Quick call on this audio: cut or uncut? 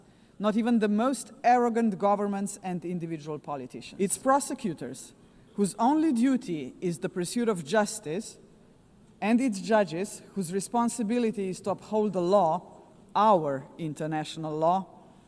cut